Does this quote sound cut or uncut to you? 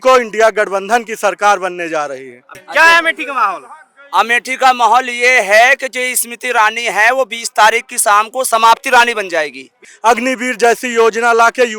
cut